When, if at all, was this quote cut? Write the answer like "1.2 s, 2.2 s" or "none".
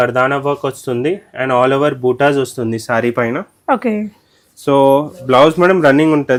none

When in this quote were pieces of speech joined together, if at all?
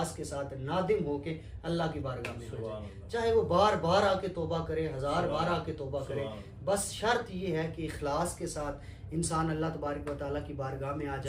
none

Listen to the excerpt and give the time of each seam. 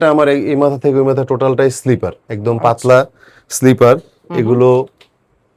none

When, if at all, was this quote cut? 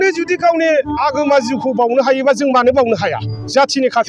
none

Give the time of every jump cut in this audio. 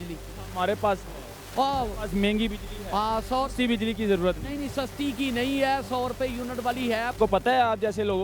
7.1 s

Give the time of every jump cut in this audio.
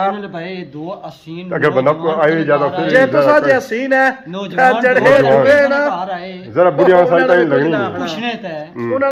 none

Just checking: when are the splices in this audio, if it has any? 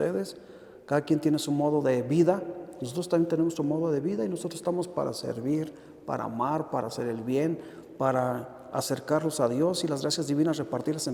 none

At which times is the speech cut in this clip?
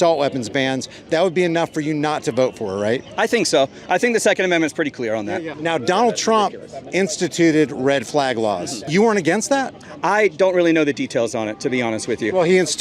5.5 s, 8.8 s

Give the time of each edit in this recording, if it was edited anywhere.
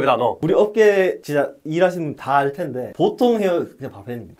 none

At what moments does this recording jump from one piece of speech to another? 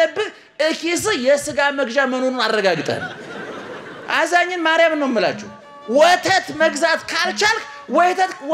none

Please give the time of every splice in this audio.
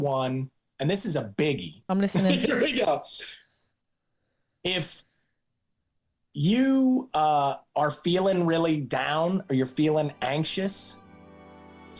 1.7 s

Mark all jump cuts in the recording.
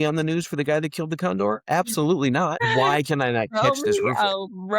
2.6 s

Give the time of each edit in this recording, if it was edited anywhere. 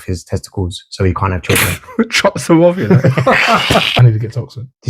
4.0 s

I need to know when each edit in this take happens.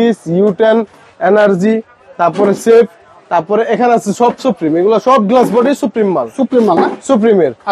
none

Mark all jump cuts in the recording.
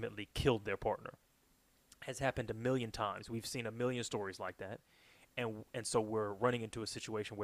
none

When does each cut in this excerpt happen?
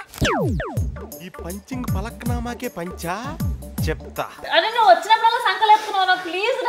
4.5 s

